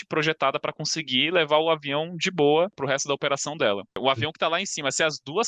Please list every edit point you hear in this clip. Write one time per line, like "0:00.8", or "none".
0:02.8
0:04.0